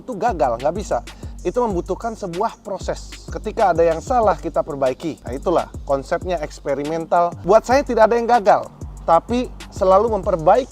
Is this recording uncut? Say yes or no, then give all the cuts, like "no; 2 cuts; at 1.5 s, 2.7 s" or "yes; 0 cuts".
no; 2 cuts; at 5.3 s, 7.4 s